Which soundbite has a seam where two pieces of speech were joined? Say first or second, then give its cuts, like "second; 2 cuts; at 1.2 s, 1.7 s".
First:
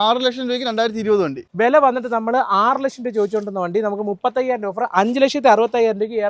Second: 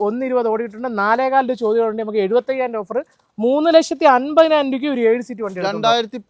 first; 1 cut; at 1.4 s